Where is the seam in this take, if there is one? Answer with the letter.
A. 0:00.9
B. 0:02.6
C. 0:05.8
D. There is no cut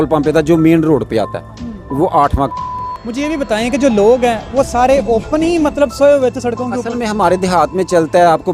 B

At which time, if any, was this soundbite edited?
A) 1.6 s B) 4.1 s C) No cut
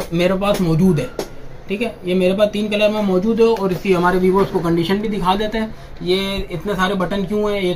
C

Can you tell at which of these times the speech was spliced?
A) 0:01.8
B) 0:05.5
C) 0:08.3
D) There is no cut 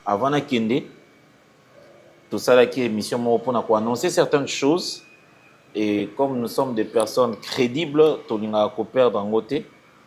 D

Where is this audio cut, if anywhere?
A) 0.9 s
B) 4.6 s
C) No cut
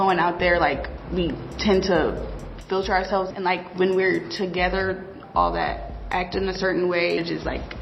A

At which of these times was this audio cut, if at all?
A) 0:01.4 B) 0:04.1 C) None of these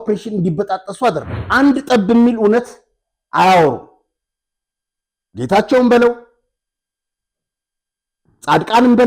A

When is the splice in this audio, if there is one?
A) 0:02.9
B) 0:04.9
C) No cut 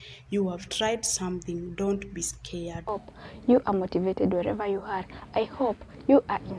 A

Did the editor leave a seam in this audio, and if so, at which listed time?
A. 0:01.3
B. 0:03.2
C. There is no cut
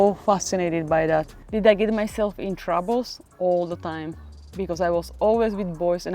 A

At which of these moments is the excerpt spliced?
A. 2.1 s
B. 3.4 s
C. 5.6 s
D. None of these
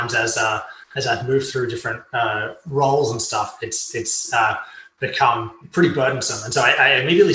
C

